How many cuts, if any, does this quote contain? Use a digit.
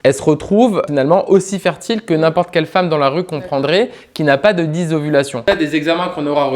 1